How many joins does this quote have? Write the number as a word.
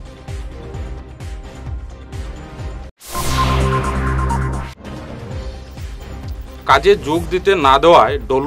one